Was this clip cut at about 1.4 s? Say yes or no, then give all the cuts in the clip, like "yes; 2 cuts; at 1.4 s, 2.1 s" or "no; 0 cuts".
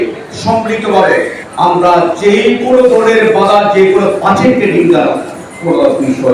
yes; 1 cut; at 1.4 s